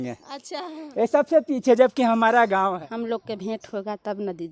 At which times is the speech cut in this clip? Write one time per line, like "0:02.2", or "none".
0:02.7